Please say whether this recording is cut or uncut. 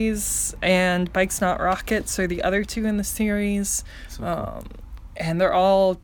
uncut